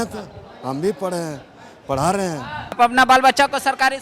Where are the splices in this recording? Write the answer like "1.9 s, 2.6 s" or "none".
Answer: 2.8 s